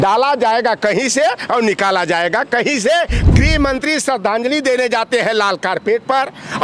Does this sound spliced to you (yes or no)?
yes